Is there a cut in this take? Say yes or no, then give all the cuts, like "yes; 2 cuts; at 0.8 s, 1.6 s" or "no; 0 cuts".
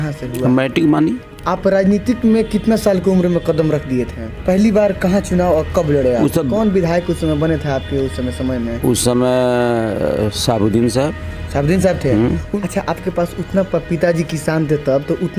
yes; 4 cuts; at 1.3 s, 4.2 s, 6.5 s, 12.5 s